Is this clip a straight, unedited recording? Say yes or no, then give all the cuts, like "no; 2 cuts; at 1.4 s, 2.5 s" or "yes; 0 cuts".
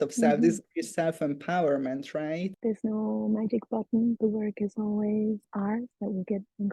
no; 2 cuts; at 2.5 s, 4.2 s